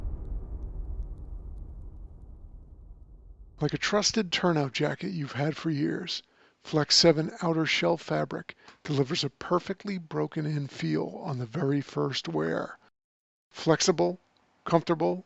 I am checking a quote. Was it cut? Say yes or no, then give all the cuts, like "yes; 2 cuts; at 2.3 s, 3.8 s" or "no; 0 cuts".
yes; 1 cut; at 3.5 s